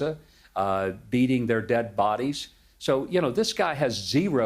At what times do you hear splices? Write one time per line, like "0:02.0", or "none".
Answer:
none